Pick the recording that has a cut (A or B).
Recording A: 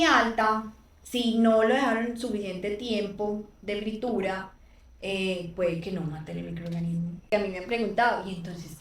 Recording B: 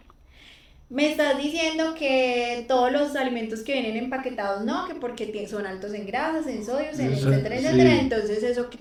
A